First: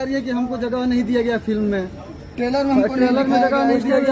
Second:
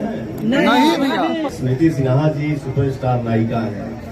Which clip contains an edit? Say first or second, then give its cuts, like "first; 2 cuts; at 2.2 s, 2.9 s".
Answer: second; 1 cut; at 1.5 s